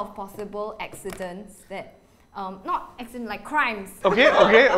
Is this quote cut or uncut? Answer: cut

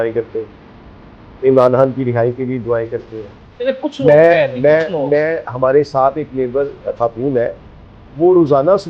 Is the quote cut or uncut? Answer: uncut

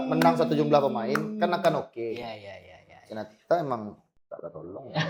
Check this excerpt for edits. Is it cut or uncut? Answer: uncut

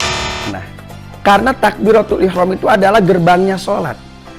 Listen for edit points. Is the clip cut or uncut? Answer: cut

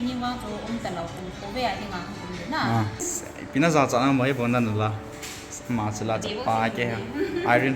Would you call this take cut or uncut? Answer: cut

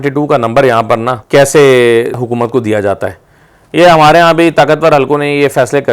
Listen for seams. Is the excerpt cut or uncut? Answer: cut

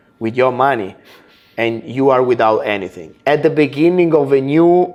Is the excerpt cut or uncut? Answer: uncut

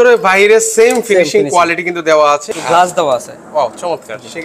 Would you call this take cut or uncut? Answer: cut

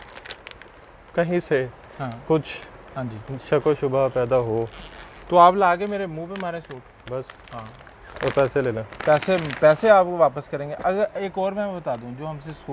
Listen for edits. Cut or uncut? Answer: uncut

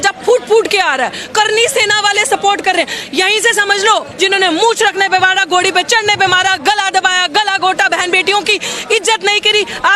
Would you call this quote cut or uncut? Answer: cut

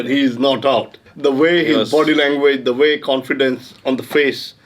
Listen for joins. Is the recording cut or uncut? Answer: cut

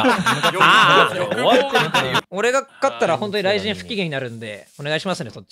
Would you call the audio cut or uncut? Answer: cut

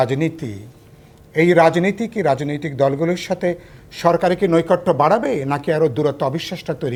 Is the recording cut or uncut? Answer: uncut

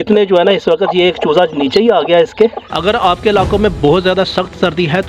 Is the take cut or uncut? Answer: cut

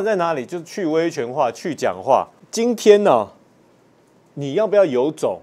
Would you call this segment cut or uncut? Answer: cut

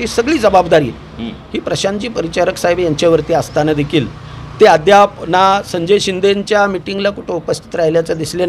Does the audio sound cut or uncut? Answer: uncut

